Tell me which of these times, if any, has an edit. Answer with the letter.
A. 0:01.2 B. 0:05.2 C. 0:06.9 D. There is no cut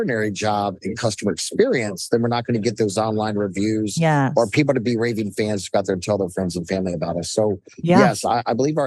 D